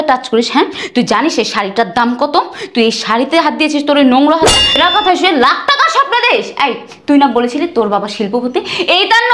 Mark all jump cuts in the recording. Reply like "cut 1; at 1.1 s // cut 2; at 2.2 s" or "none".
cut 1; at 4.8 s